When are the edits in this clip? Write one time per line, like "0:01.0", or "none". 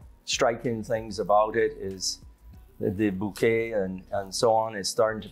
none